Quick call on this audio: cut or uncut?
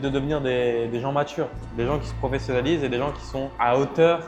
uncut